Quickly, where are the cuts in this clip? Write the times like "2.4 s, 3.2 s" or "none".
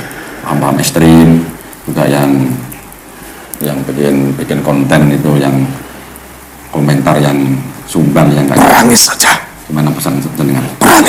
none